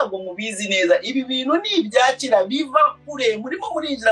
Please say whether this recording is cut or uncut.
uncut